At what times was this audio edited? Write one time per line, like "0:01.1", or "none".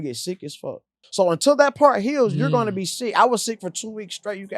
0:01.0